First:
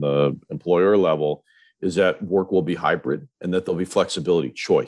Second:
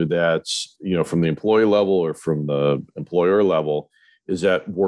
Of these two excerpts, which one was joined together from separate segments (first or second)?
first